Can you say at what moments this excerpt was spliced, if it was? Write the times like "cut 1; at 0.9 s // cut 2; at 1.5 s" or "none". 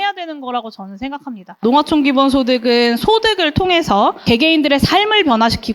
cut 1; at 1.6 s